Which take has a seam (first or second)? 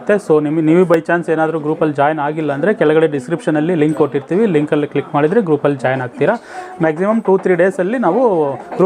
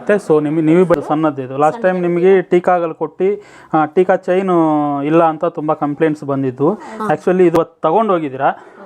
second